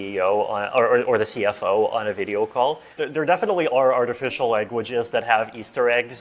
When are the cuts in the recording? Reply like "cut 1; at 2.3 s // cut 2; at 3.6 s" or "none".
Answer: cut 1; at 3.0 s